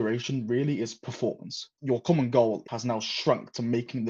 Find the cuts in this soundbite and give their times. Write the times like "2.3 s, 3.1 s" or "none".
1.7 s, 2.7 s